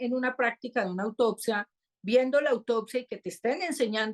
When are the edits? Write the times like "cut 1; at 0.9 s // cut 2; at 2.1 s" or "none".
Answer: none